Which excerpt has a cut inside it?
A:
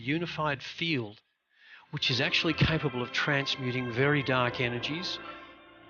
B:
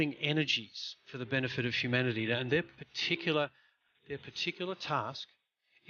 B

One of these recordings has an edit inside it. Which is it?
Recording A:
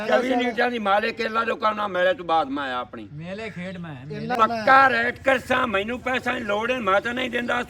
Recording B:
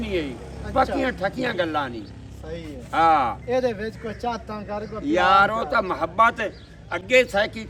A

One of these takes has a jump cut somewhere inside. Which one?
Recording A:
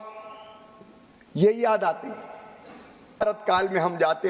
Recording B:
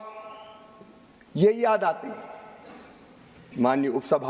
A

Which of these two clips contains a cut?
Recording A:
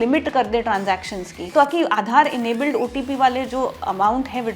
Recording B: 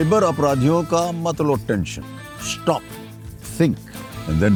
A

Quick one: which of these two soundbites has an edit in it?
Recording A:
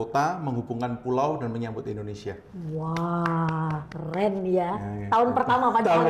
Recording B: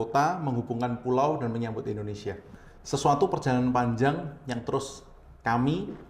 B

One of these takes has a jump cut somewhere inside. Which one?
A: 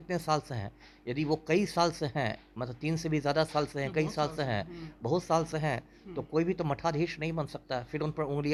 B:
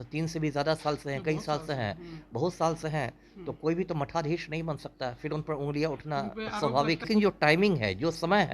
B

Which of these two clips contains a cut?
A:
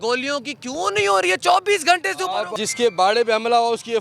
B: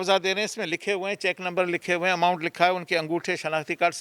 A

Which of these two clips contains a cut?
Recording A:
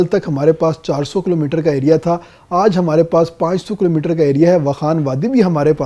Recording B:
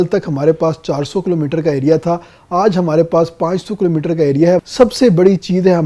B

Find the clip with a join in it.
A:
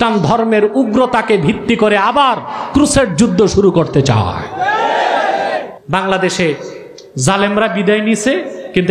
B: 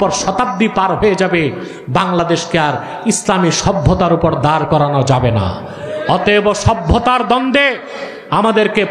A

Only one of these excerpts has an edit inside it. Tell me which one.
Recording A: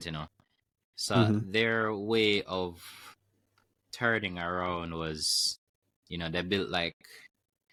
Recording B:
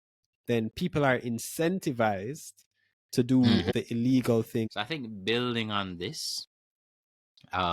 B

